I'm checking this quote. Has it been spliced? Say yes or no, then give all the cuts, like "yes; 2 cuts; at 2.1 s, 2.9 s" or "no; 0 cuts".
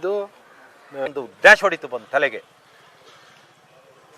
yes; 1 cut; at 1.1 s